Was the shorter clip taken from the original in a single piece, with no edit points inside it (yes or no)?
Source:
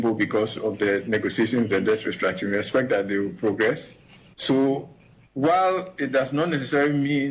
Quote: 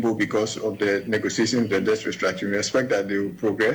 yes